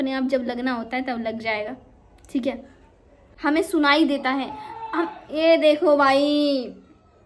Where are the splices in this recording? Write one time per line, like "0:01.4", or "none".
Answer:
0:03.2